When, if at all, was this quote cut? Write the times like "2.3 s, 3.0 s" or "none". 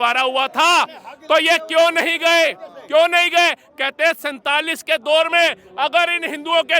none